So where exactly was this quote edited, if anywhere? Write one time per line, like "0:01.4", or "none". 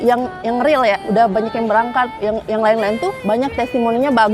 0:01.0
0:03.2